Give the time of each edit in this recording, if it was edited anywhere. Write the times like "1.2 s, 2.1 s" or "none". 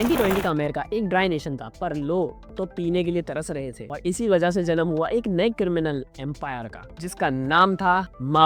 none